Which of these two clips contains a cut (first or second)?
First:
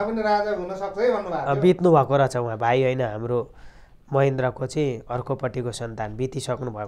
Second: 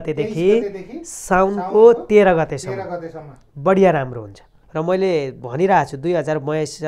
second